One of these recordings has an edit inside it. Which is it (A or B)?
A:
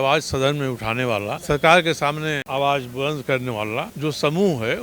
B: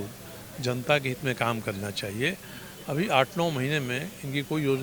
A